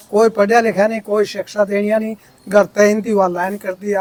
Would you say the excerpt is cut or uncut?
uncut